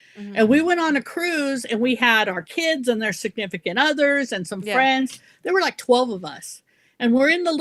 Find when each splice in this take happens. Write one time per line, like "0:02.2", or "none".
none